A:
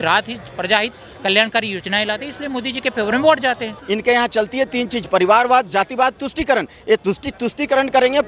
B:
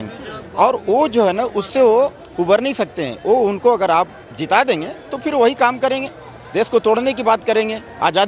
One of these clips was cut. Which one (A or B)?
A